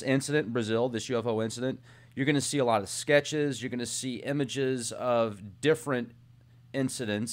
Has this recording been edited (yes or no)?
no